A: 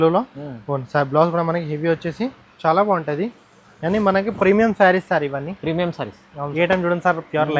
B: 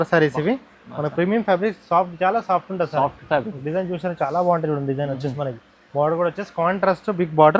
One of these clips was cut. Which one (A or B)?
A